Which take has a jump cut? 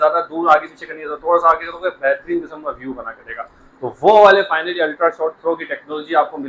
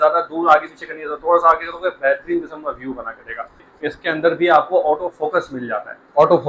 second; 1 cut; at 3.7 s

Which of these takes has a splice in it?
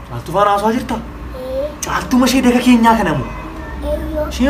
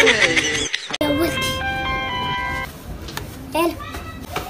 second; 1 cut; at 1.0 s

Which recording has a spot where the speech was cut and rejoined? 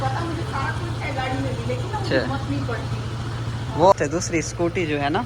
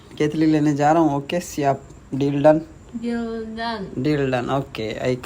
first; 1 cut; at 3.9 s

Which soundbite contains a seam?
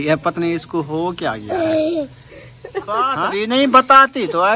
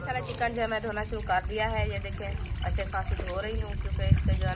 first; 1 cut; at 3.2 s

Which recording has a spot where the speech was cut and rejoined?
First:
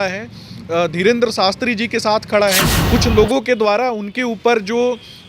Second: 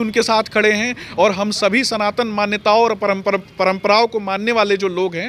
first; 1 cut; at 2.7 s

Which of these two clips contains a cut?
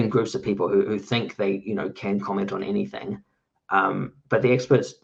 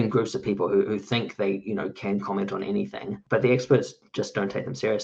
second; 1 cut; at 3.2 s

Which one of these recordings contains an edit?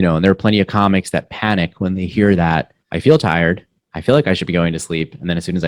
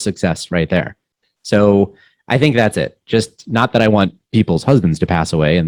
first; 1 cut; at 2.8 s

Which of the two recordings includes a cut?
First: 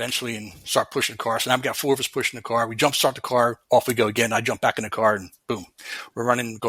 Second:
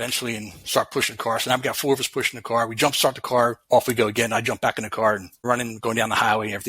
second; 1 cut; at 5.3 s

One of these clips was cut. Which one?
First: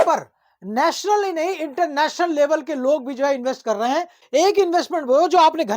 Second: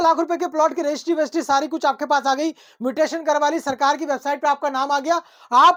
first; 1 cut; at 4.2 s

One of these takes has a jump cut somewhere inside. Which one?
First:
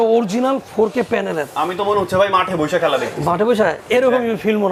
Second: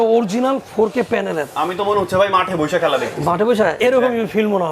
second; 1 cut; at 3.8 s

